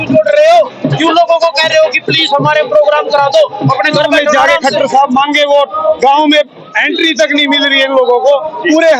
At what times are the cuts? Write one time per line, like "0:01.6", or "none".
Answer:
0:04.3